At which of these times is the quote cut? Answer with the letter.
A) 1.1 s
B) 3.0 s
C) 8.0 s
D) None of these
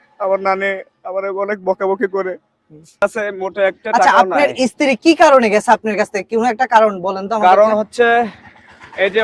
B